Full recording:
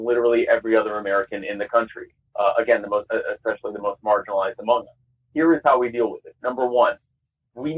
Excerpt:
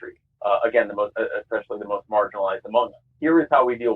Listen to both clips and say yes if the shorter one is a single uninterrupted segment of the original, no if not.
no